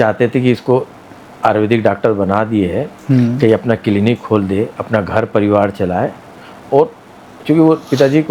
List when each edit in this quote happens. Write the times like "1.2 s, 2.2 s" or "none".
none